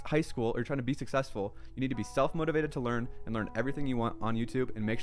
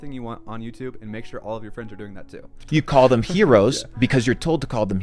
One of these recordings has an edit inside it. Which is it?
second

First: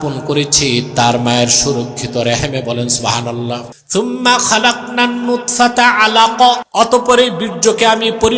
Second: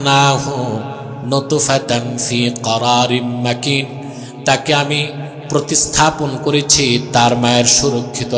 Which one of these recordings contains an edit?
first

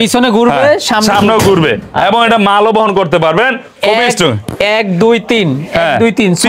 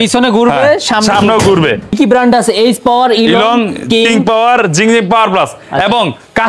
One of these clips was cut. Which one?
second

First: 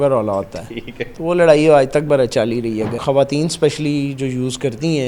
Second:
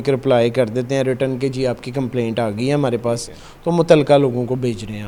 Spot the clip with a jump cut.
first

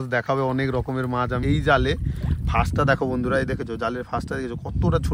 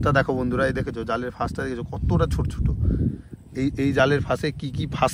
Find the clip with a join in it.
first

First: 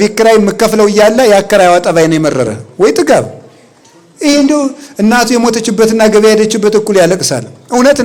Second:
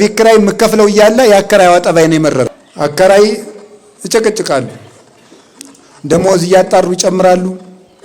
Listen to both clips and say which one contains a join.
second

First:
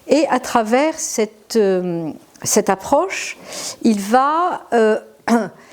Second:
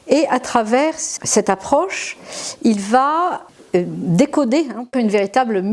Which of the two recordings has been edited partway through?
second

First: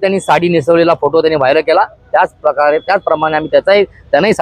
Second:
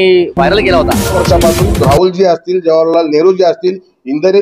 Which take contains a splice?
second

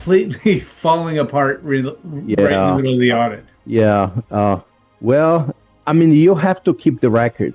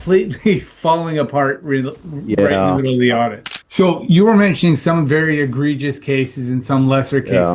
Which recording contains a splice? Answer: second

